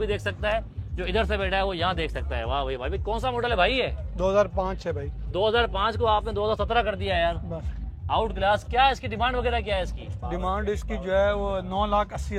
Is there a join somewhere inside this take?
no; 0 cuts

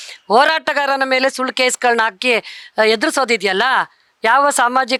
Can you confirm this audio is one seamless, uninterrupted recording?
yes; 0 cuts

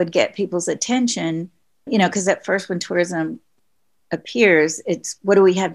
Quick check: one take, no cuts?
yes; 0 cuts

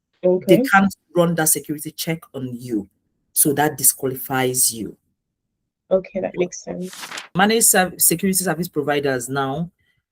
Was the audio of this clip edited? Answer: yes; 1 cut; at 7.2 s

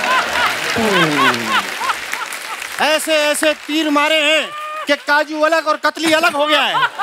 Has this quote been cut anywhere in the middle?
no; 0 cuts

